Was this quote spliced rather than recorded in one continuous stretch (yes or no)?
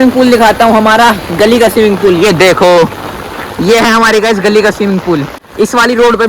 yes